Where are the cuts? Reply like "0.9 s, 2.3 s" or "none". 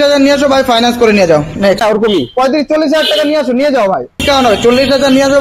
1.8 s, 4.2 s